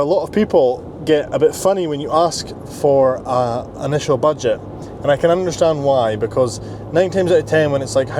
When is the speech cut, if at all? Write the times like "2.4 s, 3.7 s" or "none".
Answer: none